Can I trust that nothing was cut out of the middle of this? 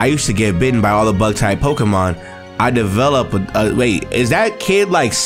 yes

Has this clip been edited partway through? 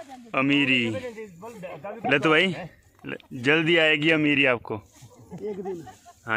no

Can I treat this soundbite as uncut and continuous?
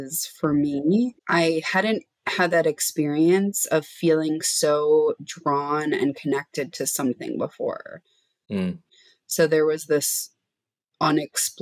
no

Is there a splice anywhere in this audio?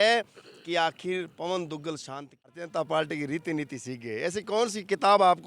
yes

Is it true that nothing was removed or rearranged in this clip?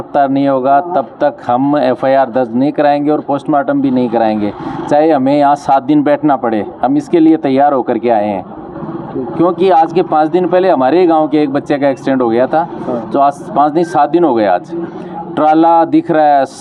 yes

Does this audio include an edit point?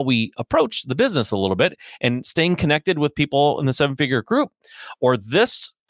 no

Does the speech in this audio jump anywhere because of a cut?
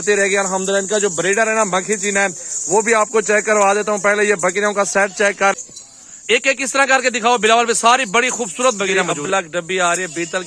yes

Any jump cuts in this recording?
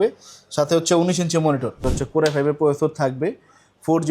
yes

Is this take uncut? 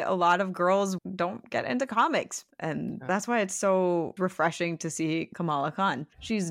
no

